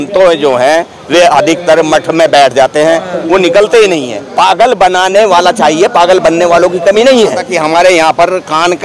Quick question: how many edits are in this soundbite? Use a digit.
2